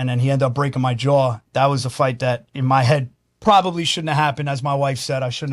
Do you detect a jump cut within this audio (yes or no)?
yes